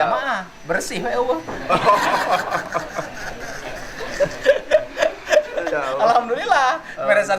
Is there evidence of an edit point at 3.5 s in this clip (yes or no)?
no